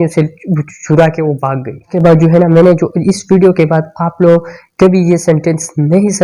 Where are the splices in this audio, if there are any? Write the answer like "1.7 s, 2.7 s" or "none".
1.9 s